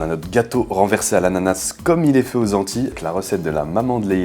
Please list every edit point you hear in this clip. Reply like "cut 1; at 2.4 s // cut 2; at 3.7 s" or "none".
cut 1; at 2.9 s